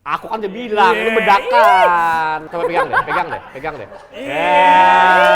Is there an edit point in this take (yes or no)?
yes